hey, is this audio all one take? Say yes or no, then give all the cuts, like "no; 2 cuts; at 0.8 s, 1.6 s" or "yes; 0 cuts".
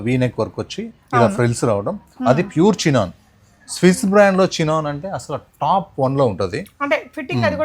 yes; 0 cuts